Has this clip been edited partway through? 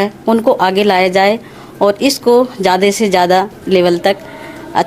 yes; 1 cut; at 3.6 s

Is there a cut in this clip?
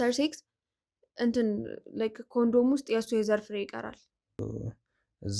yes; 1 cut; at 4.4 s

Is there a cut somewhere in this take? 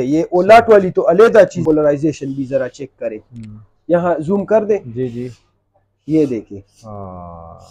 yes; 1 cut; at 1.6 s

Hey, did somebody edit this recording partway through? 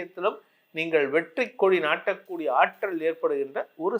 no; 0 cuts

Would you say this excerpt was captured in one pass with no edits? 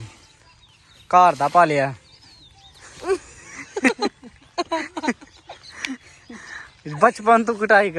yes; 0 cuts

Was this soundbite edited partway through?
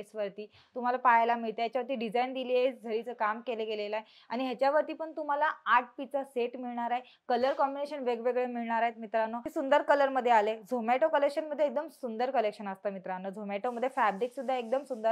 yes; 1 cut; at 9.4 s

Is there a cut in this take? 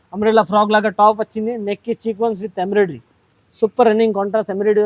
no; 0 cuts

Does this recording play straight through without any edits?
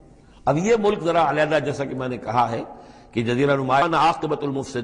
no; 1 cut; at 3.8 s

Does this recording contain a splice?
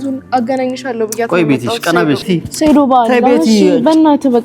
yes; 1 cut; at 2.3 s

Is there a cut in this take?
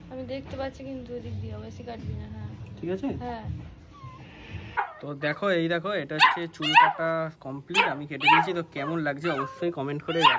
yes; 1 cut; at 4.8 s

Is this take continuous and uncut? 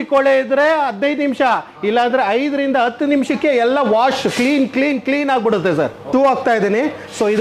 no; 1 cut; at 6.1 s

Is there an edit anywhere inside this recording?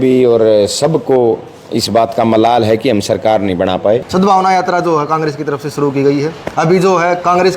yes; 1 cut; at 4.1 s

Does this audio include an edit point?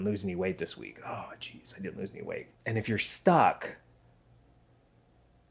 no; 0 cuts

